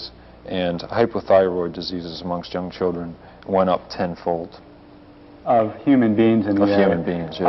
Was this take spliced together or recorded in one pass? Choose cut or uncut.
uncut